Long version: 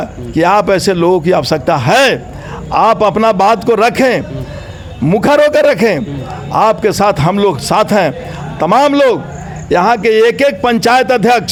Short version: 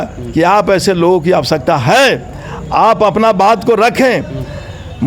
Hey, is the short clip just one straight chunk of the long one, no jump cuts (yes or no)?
yes